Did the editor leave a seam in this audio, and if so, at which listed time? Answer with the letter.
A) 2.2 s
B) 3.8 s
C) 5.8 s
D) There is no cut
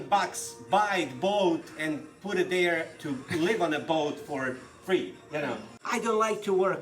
C